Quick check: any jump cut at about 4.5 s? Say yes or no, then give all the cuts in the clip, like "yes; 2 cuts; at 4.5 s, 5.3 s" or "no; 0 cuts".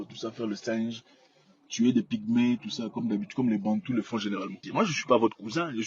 yes; 1 cut; at 4.5 s